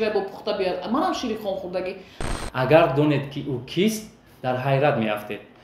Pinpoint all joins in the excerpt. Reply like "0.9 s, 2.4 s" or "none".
2.3 s